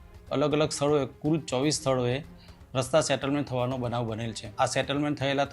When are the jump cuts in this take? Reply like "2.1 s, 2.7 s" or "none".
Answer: 4.4 s